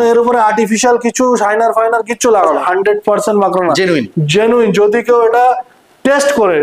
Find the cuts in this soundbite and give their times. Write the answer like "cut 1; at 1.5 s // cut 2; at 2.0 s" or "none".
cut 1; at 2.6 s